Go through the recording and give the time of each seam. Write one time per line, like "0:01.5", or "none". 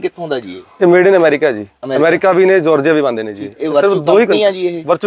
none

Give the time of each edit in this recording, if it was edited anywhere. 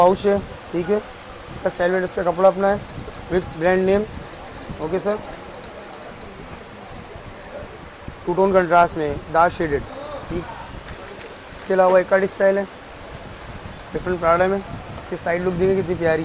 0:10.4

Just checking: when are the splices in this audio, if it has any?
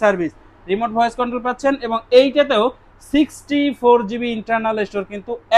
none

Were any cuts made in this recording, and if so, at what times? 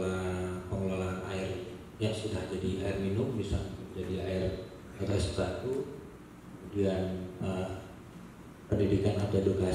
none

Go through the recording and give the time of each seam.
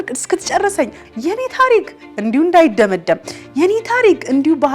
0:01.0

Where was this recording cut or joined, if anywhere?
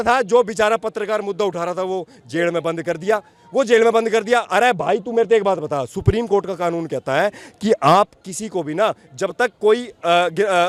none

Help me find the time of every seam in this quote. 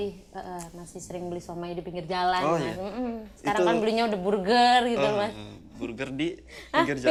none

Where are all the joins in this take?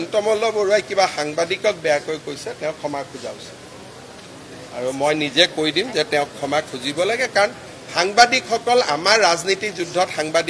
none

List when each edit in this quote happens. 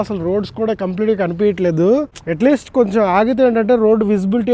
0:02.2

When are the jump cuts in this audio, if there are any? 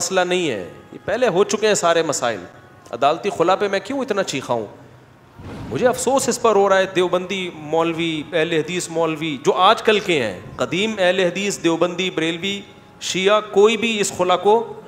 none

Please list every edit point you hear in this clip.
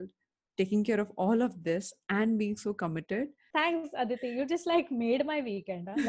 0:03.4

